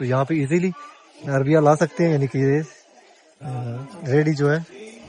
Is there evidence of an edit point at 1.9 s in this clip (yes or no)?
no